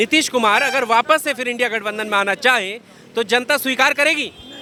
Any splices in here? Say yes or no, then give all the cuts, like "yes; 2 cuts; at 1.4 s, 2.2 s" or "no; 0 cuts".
no; 0 cuts